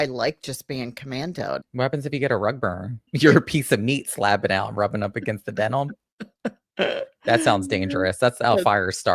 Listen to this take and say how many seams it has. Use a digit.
2